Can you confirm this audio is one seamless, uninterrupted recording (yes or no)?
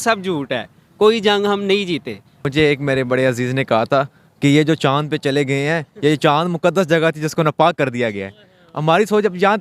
no